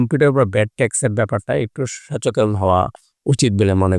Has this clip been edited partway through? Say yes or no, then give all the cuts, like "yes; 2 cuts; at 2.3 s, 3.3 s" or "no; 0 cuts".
no; 0 cuts